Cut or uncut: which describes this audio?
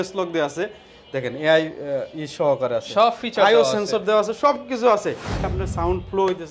cut